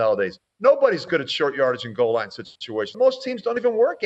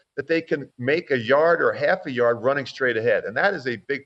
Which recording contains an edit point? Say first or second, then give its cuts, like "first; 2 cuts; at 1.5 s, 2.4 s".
first; 1 cut; at 2.9 s